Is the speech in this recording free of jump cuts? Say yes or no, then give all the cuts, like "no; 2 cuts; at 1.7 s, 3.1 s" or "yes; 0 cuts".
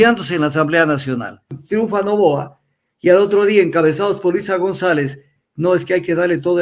no; 1 cut; at 1.6 s